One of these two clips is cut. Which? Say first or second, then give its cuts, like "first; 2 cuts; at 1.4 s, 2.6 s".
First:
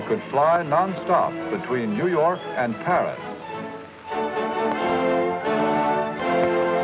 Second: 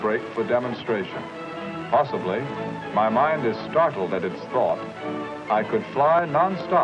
second; 1 cut; at 2.4 s